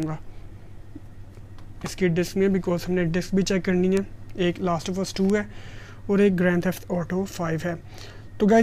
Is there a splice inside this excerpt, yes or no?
no